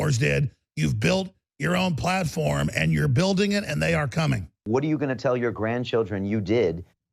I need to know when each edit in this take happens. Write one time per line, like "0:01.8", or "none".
0:04.6